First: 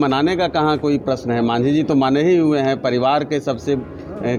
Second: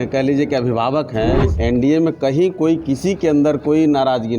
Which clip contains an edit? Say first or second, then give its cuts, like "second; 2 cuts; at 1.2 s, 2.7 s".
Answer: second; 1 cut; at 1.5 s